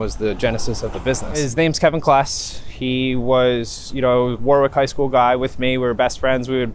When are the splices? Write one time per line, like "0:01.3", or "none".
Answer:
0:01.3